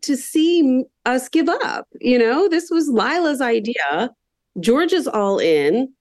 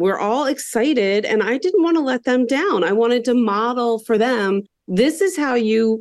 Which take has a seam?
second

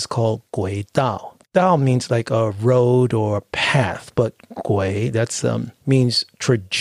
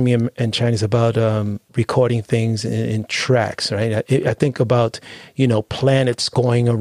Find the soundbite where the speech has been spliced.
first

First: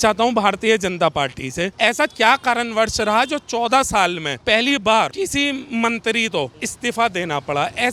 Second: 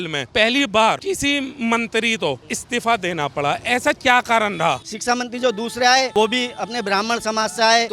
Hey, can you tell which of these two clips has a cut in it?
second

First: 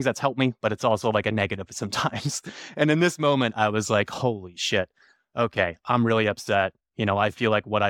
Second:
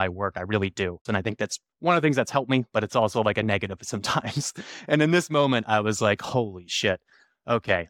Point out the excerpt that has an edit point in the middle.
second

